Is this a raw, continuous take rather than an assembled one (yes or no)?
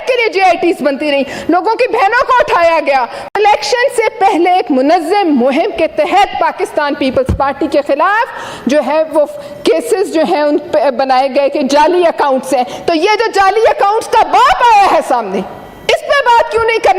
yes